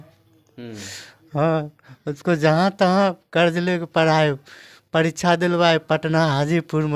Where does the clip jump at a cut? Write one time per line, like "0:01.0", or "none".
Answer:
none

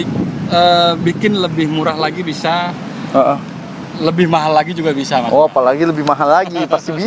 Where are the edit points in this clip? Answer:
none

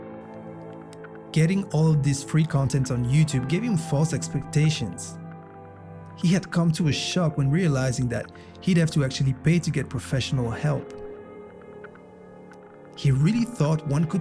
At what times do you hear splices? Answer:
0:00.9

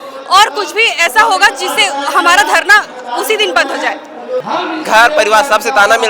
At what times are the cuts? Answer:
0:04.4

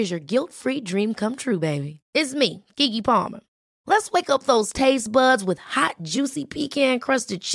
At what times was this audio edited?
none

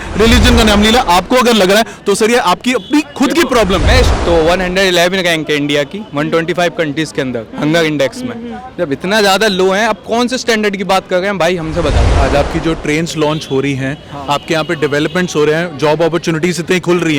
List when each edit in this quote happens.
0:04.2
0:12.1

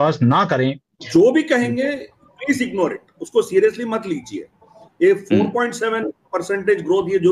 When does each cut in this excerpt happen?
0:01.0

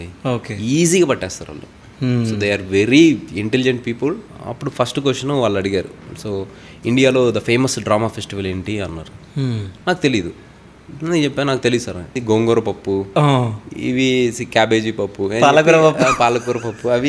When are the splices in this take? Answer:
0:04.3
0:12.2

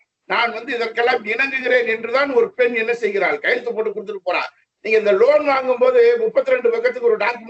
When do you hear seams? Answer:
none

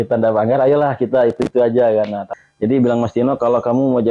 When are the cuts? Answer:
0:02.2

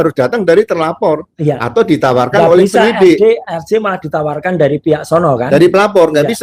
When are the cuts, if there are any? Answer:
none

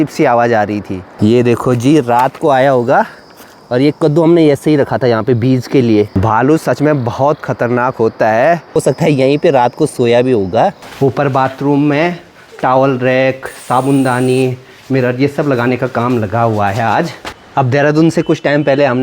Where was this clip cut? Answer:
0:01.1
0:06.1
0:08.8
0:10.8
0:17.2

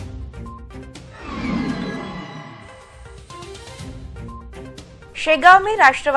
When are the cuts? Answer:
0:00.9

